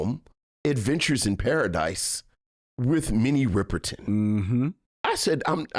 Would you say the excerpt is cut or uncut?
cut